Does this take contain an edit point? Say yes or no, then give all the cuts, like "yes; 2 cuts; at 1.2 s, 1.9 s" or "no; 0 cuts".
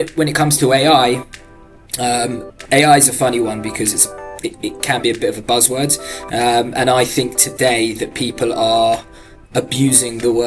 no; 0 cuts